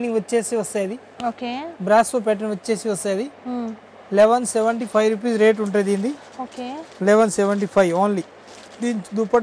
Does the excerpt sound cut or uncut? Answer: uncut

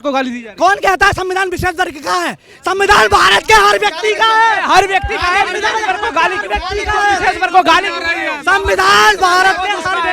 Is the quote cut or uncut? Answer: uncut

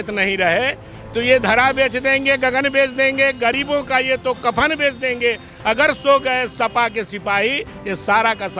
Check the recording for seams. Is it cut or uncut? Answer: uncut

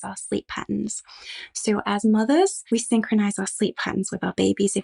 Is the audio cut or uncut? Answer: cut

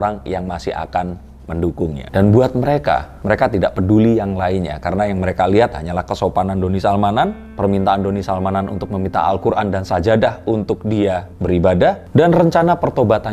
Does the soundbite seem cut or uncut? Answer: uncut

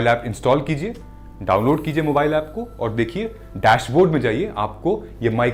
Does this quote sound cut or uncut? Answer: uncut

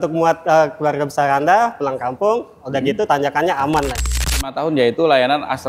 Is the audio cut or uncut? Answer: cut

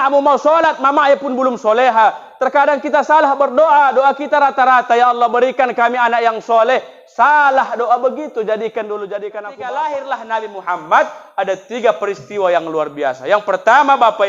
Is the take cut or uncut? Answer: cut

